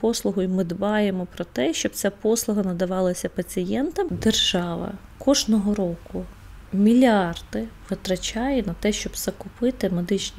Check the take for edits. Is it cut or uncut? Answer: cut